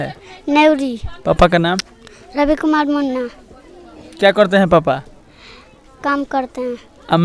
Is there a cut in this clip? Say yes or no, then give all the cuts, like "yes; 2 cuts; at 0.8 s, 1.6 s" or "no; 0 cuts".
no; 0 cuts